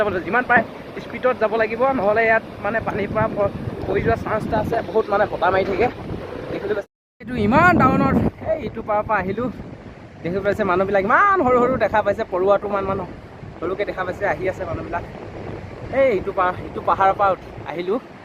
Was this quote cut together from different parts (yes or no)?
no